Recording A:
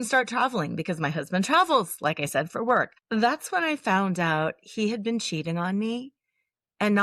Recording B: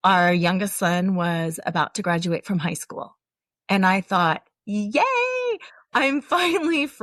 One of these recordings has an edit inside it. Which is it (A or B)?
A